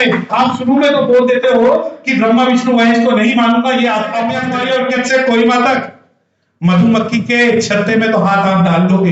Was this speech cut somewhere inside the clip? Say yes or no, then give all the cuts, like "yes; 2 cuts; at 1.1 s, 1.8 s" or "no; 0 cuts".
yes; 1 cut; at 4.4 s